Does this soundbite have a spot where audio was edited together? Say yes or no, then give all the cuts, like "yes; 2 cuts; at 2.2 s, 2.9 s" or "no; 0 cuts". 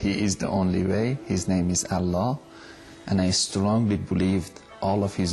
no; 0 cuts